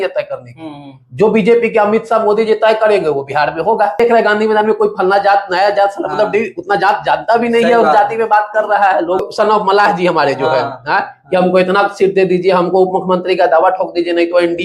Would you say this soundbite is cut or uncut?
cut